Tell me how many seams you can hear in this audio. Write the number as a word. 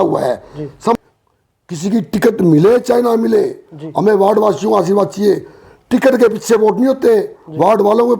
one